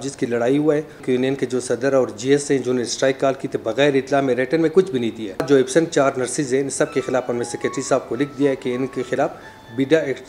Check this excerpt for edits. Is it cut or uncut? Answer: cut